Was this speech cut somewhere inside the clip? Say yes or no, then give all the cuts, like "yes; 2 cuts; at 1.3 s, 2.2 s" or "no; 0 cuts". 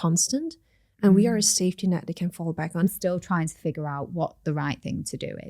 yes; 1 cut; at 2.8 s